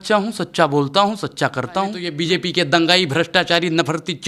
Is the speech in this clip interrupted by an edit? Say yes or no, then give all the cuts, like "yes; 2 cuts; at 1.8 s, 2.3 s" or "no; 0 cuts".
yes; 1 cut; at 2.1 s